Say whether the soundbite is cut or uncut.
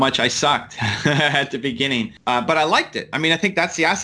cut